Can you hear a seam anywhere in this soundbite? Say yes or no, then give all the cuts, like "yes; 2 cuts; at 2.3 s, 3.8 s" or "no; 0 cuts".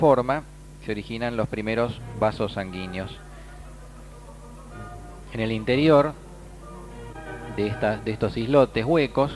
yes; 1 cut; at 6.8 s